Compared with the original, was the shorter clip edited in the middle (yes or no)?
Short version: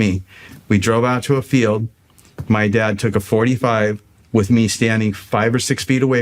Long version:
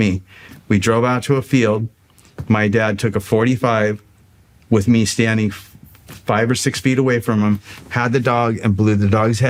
yes